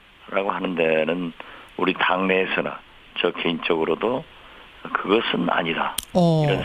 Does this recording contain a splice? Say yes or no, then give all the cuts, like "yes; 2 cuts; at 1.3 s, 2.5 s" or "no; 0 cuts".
yes; 1 cut; at 1.7 s